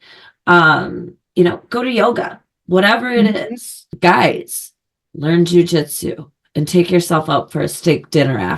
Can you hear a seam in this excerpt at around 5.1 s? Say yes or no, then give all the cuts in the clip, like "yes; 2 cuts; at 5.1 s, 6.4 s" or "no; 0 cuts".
no; 1 cut; at 3.9 s